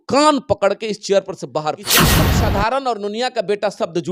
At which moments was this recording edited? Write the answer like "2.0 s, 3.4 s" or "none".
2.2 s